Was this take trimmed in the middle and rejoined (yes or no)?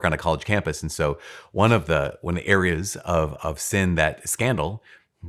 no